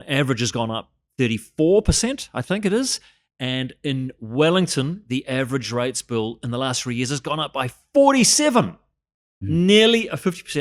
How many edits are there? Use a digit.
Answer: 0